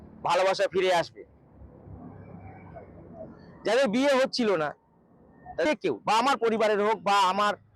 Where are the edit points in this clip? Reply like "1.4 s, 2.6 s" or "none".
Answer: 5.7 s